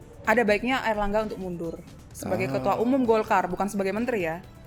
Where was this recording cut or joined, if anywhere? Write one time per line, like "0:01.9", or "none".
none